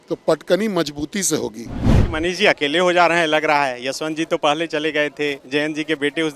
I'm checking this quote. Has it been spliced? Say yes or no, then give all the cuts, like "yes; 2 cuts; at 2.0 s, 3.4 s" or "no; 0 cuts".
yes; 1 cut; at 1.9 s